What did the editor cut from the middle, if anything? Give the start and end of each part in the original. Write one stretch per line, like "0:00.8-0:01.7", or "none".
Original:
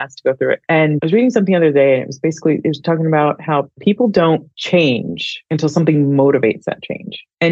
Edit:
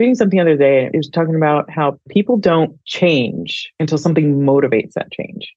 0:02.1-0:02.6